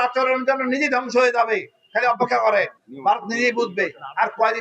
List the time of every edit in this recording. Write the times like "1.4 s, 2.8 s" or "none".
2.8 s